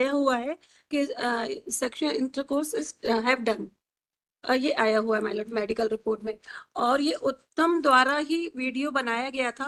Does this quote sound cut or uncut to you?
uncut